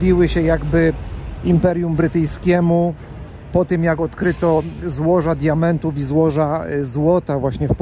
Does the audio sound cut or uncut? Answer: uncut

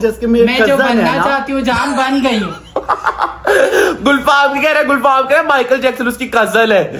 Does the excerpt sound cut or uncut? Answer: uncut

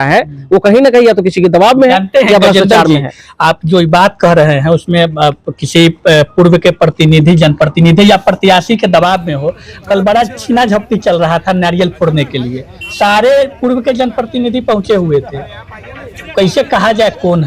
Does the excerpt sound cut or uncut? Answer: uncut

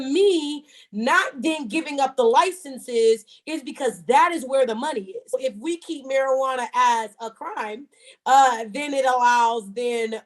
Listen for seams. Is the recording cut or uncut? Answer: cut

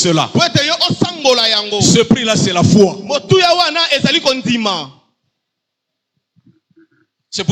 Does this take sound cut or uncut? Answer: uncut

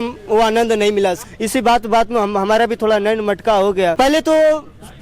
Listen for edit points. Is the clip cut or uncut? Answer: cut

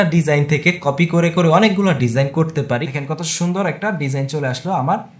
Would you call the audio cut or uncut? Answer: cut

